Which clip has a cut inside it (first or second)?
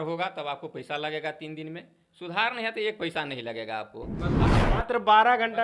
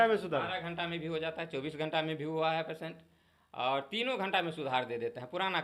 first